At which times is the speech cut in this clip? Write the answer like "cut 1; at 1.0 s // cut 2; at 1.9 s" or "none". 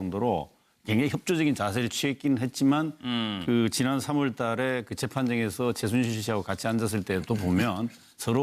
cut 1; at 6.8 s